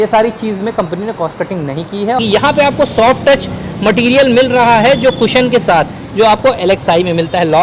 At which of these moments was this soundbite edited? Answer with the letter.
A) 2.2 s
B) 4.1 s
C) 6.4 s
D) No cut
A